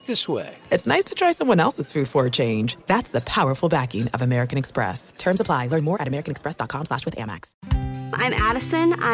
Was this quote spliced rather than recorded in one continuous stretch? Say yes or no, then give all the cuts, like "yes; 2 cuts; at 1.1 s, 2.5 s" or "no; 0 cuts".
yes; 1 cut; at 7.5 s